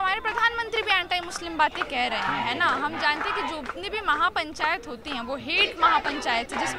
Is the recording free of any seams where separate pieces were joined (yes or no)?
yes